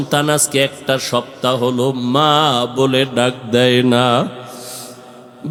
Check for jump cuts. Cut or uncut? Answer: uncut